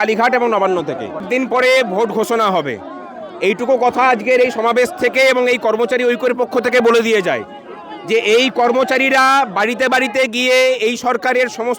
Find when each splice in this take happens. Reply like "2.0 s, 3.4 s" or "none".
1.2 s